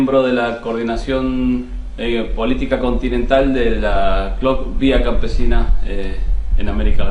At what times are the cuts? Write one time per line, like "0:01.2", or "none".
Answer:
0:05.1

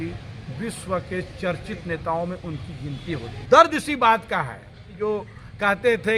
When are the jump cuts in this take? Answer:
0:03.3
0:04.9

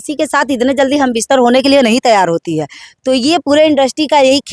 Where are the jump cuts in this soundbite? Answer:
none

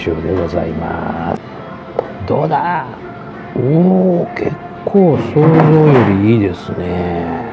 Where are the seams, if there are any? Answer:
0:01.5

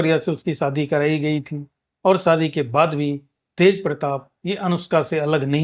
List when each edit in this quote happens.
none

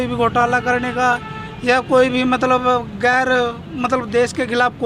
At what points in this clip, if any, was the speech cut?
none

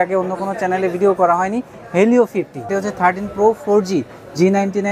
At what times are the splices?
0:02.6

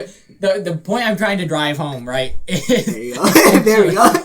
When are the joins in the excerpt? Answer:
0:03.3

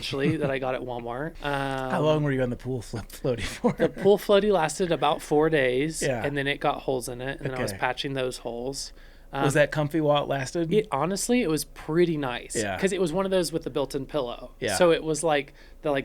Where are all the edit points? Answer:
0:01.3

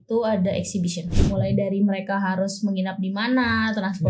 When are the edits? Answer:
0:01.1

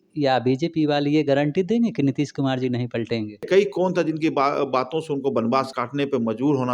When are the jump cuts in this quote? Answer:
0:03.5
0:05.8

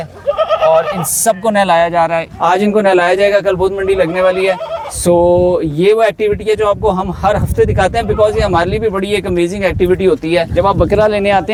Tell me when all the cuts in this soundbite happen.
none

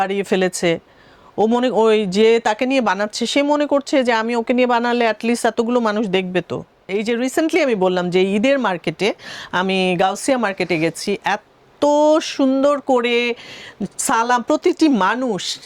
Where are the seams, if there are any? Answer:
0:06.9

